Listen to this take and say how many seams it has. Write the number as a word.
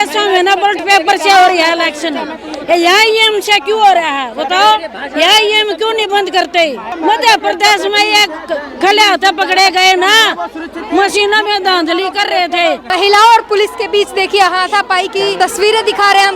two